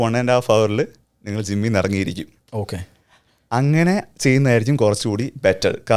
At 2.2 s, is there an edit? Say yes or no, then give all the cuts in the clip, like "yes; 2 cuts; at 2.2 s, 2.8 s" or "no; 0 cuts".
no; 0 cuts